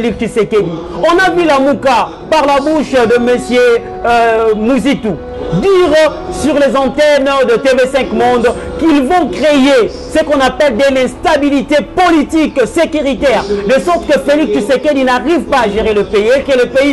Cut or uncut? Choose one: uncut